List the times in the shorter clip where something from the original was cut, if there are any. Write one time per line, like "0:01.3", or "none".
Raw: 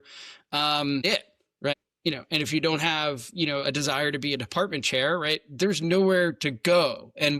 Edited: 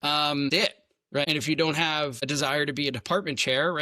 0:01.3
0:02.2